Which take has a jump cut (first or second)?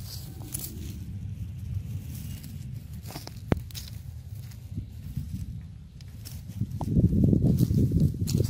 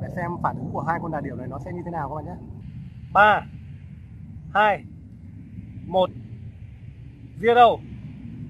second